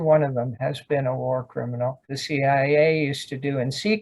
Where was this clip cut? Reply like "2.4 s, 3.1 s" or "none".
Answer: 2.0 s